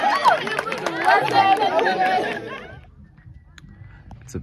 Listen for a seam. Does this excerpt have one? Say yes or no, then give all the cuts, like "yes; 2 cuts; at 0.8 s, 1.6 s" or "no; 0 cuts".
yes; 1 cut; at 2.5 s